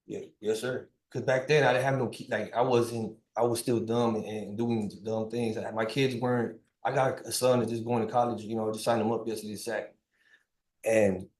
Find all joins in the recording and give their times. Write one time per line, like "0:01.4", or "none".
none